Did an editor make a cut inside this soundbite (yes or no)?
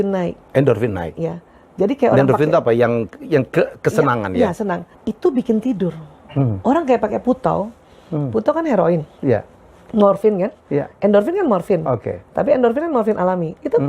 yes